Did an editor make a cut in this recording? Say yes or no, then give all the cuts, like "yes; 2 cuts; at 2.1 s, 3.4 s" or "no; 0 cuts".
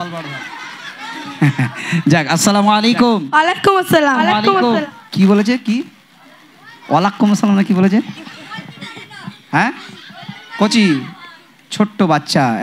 no; 0 cuts